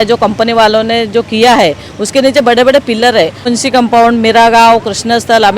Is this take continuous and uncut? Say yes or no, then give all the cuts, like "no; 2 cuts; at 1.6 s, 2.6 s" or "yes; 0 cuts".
no; 1 cut; at 3.5 s